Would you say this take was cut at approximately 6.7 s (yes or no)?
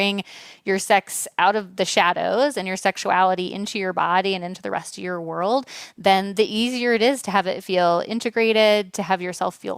no